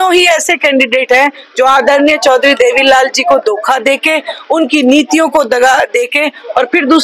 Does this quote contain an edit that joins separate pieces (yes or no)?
no